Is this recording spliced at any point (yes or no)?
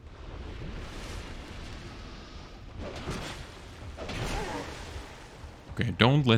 no